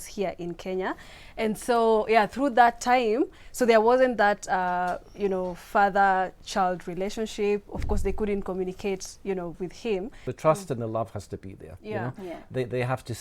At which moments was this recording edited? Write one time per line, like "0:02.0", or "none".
0:10.3